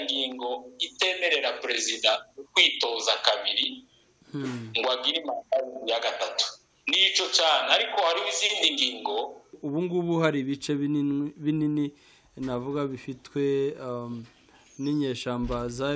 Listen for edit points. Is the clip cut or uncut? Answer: cut